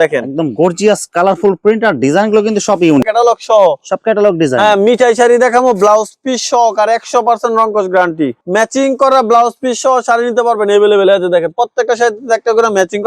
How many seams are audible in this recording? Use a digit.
2